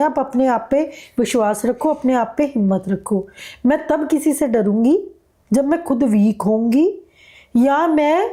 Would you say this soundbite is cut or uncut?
uncut